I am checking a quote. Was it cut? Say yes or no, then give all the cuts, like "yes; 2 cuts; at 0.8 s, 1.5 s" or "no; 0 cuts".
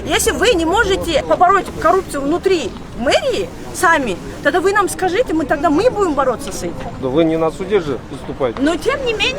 yes; 2 cuts; at 1.2 s, 7.0 s